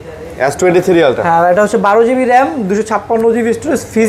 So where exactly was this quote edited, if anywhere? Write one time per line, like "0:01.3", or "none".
none